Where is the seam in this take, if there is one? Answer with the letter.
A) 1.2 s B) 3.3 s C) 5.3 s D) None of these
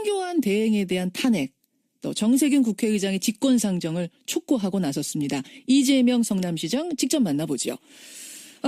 C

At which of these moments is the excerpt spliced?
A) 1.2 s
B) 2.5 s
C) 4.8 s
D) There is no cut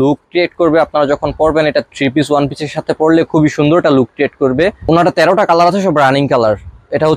C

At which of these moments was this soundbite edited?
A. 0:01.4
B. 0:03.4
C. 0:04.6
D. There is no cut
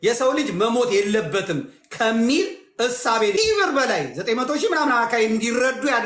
B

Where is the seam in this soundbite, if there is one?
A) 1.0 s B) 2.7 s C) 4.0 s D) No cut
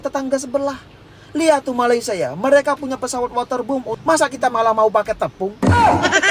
C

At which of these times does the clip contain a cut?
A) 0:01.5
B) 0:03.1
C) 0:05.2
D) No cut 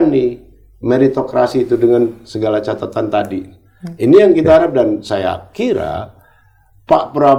D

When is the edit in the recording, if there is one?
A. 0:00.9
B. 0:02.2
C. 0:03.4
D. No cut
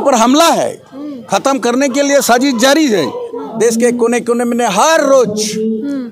C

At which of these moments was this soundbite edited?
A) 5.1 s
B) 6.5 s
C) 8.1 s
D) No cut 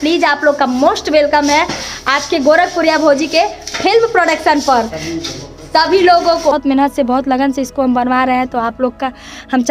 B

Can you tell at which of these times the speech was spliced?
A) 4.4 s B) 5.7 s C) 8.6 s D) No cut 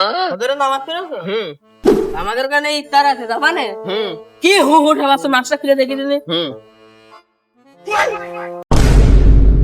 C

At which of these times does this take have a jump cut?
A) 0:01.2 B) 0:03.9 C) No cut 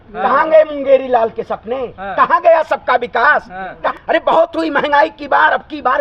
B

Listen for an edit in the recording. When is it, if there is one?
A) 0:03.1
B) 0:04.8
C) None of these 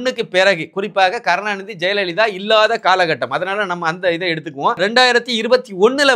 B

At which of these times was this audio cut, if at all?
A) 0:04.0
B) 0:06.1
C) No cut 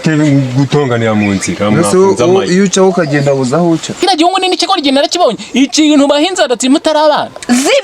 A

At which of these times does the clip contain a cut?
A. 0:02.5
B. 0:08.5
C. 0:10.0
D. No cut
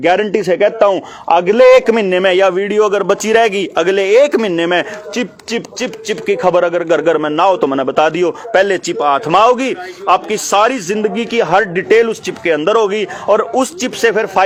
D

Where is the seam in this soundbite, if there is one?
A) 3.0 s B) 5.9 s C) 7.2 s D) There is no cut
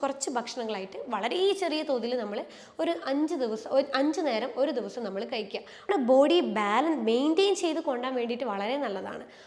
B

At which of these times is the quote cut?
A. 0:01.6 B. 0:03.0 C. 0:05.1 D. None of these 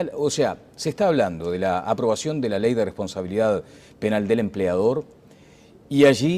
C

